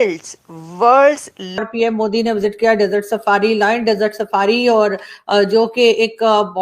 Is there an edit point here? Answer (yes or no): yes